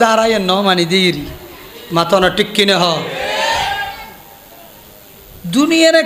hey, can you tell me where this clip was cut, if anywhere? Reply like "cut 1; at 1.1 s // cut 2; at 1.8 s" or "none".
none